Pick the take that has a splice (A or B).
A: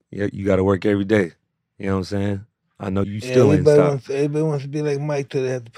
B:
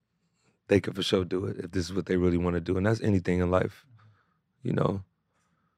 A